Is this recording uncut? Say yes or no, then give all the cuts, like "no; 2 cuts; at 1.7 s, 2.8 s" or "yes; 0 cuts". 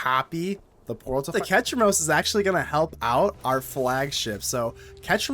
no; 1 cut; at 1.3 s